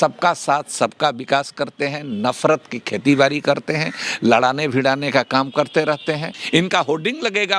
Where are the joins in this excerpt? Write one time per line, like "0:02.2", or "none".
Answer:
0:06.3